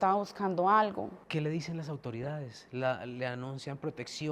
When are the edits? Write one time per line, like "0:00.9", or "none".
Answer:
0:01.2